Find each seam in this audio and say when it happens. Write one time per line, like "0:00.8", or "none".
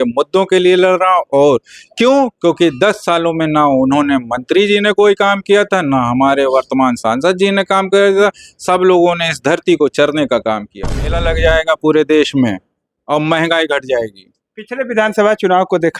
0:11.1